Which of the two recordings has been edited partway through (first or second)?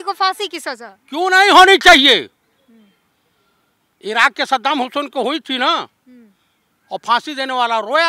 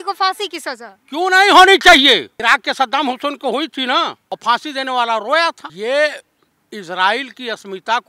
second